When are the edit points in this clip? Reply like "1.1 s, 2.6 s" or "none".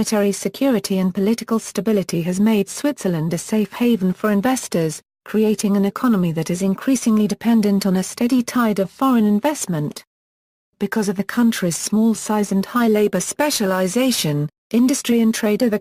none